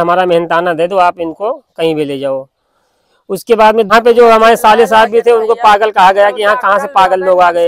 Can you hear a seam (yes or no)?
yes